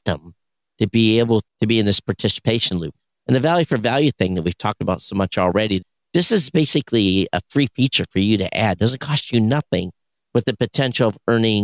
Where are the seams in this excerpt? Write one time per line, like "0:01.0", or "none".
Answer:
0:01.5
0:02.9
0:05.8

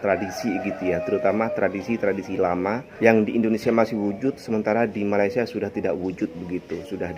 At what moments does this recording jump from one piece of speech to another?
0:02.9

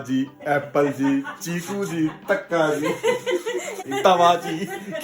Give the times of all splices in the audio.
0:03.8

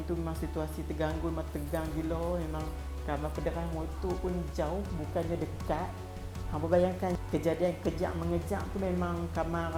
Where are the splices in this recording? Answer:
none

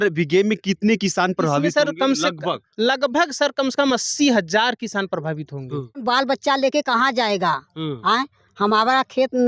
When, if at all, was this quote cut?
0:06.0

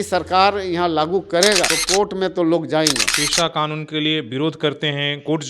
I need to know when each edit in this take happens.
0:03.1

